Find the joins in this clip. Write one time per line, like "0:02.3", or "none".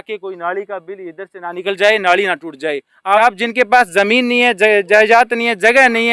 0:03.2

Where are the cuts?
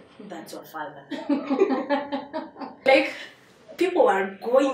0:02.8

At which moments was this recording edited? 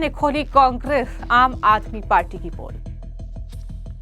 0:02.8

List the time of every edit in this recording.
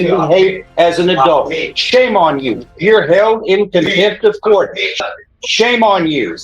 0:05.0

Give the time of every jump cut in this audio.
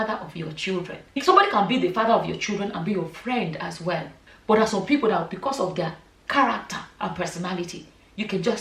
0:01.2

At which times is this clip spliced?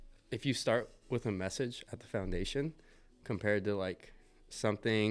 none

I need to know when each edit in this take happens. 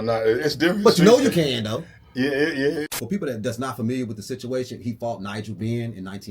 0:02.9

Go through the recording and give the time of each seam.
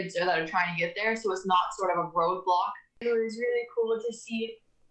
0:03.0

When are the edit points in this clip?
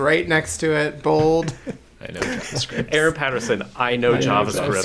none

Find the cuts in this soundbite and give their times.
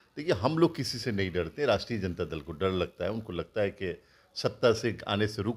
none

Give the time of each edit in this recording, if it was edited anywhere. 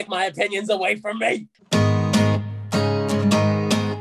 0:01.5

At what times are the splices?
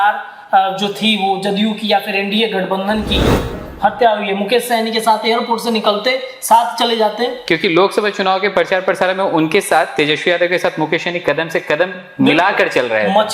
0:03.5

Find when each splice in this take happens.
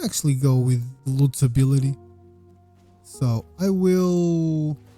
0:01.0

